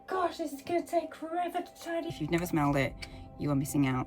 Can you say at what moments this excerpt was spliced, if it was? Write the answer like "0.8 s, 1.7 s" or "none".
2.1 s